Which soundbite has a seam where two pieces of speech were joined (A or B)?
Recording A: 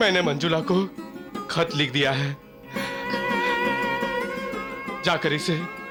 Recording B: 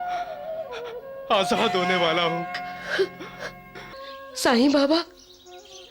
B